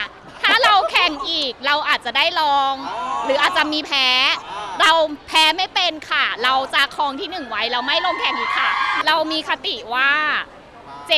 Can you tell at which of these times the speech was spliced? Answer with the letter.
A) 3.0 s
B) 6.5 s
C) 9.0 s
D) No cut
C